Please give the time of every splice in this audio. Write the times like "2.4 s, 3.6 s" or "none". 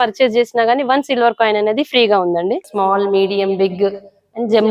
2.6 s